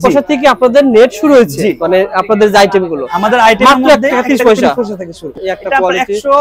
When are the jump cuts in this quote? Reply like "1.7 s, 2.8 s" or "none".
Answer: 5.2 s